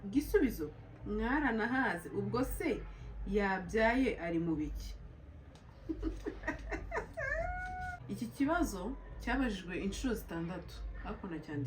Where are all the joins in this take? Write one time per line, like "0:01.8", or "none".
0:08.0